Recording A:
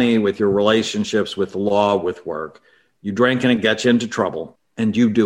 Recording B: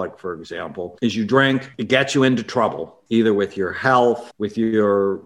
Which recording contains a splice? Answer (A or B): B